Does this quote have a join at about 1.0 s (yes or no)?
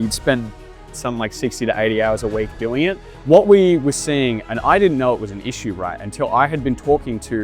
no